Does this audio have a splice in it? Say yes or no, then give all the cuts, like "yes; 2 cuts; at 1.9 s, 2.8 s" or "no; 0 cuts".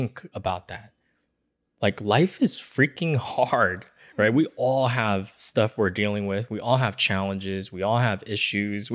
no; 0 cuts